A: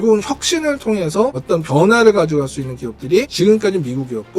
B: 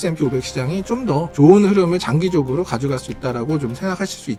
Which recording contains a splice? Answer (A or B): A